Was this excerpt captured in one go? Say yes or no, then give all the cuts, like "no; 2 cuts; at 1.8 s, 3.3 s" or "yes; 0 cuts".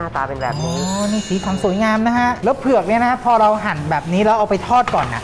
no; 1 cut; at 2.4 s